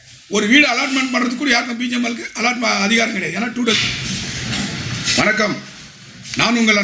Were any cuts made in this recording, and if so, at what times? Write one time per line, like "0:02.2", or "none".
0:03.8